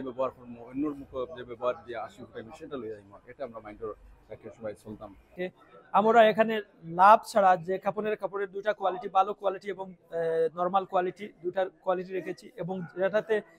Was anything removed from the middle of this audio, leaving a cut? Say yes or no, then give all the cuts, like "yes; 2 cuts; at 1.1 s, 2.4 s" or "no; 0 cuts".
yes; 1 cut; at 5.3 s